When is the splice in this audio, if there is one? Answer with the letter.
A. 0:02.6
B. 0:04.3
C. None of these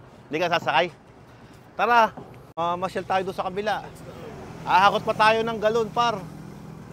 A